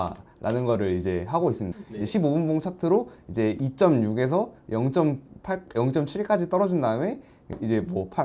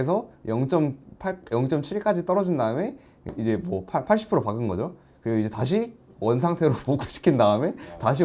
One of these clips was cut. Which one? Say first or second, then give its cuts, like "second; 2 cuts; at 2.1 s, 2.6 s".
first; 1 cut; at 1.7 s